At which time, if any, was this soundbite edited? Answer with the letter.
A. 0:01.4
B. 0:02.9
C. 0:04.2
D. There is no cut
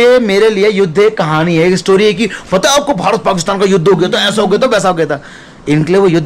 D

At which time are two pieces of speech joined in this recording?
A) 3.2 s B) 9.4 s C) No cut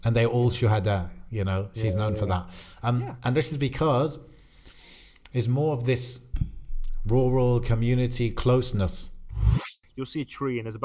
B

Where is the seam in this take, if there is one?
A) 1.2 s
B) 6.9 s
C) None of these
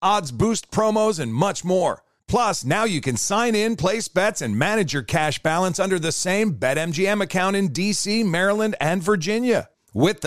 C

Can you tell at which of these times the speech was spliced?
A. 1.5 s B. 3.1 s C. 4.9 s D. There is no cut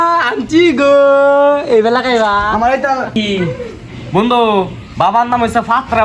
B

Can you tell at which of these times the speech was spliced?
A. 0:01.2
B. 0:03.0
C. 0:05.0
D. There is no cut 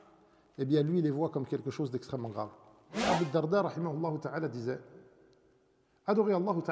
B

